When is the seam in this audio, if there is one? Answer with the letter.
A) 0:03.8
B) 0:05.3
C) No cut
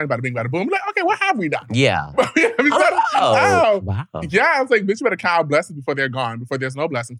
A